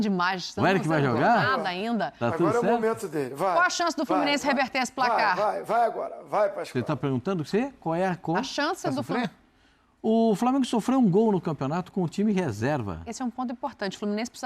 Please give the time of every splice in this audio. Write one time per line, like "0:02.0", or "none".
0:09.1